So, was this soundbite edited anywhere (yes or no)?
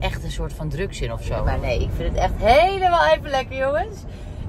yes